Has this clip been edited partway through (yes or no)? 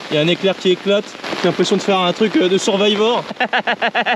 yes